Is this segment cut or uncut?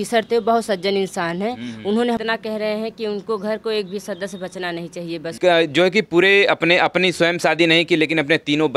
cut